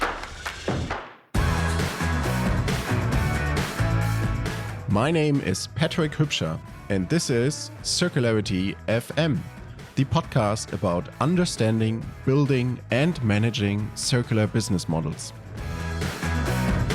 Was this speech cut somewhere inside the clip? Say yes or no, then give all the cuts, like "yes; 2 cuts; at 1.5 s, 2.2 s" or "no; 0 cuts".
no; 0 cuts